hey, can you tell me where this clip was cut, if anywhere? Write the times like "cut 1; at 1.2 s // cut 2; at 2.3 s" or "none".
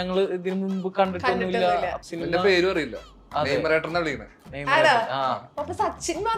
cut 1; at 2.0 s // cut 2; at 5.5 s